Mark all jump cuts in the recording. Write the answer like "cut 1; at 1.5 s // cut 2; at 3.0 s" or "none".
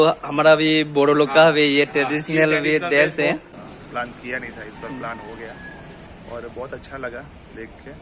cut 1; at 3.5 s